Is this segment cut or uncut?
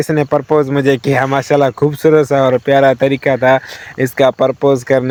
uncut